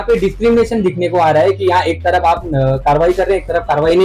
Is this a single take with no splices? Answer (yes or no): yes